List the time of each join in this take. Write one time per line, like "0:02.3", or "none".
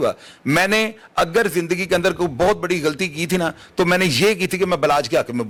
none